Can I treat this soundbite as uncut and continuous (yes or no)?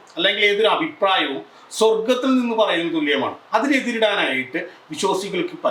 yes